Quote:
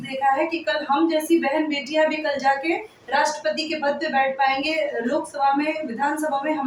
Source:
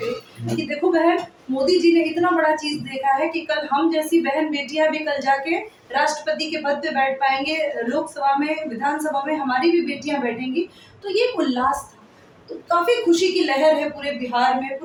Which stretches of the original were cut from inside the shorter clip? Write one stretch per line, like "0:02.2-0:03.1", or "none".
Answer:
none